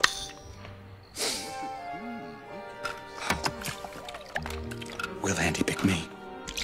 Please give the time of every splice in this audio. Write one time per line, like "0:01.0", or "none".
none